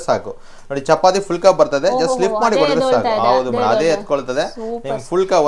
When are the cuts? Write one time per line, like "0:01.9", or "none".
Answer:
none